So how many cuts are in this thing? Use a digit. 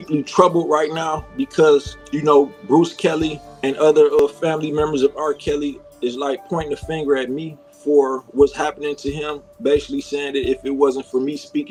0